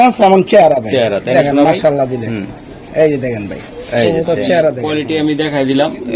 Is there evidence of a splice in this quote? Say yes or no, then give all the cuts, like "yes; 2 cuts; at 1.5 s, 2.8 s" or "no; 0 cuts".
yes; 1 cut; at 4.8 s